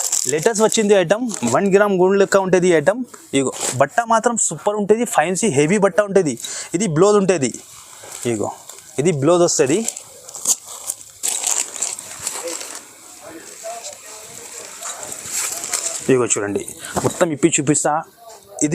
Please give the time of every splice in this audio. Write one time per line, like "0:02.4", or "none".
none

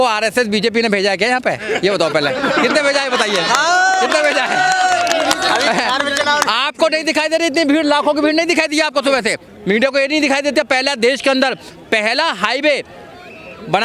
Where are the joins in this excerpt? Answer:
0:09.4

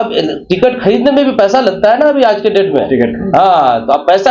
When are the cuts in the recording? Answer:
none

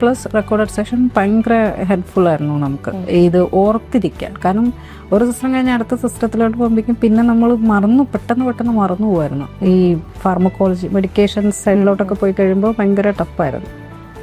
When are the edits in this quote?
none

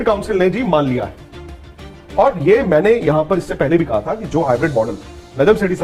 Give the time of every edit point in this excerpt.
none

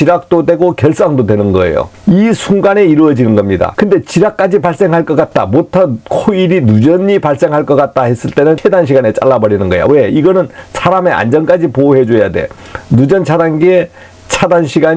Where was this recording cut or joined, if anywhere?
0:01.9
0:03.7
0:08.6

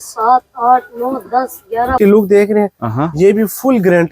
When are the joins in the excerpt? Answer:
0:02.0

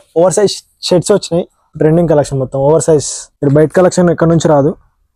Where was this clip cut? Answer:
0:01.6
0:03.2

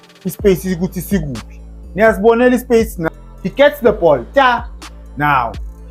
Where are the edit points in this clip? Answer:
0:03.1

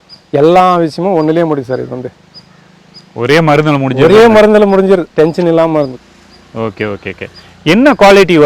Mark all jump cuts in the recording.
none

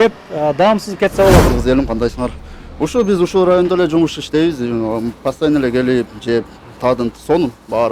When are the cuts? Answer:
0:01.4

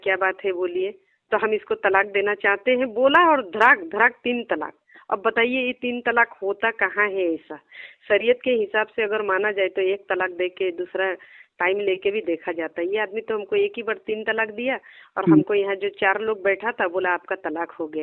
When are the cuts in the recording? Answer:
none

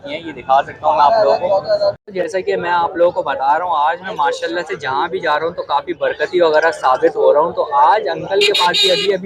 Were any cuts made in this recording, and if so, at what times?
0:02.0

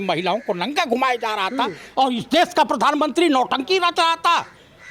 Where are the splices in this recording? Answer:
none

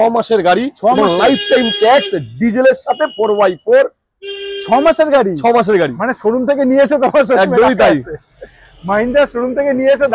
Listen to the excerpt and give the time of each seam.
none

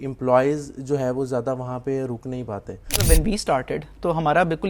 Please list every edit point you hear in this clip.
0:03.0

